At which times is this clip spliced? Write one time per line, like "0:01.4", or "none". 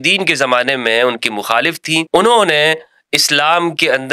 0:02.1